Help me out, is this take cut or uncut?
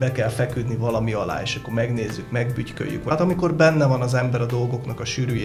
cut